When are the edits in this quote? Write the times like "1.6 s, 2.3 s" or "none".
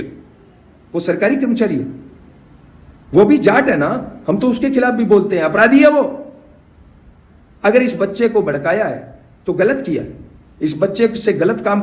none